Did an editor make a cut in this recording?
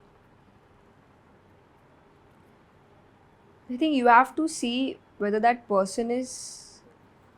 no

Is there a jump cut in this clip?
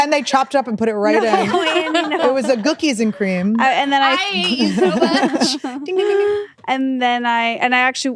yes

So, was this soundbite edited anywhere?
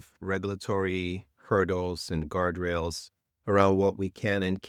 no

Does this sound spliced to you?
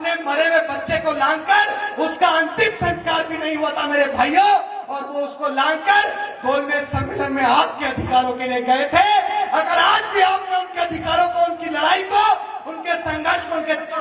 no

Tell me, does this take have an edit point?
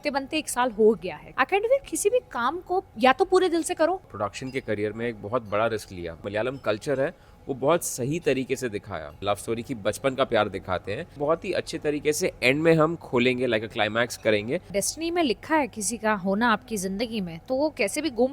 yes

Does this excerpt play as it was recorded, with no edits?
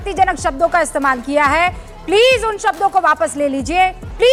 yes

